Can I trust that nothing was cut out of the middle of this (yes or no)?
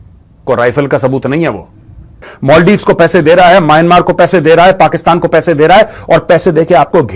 no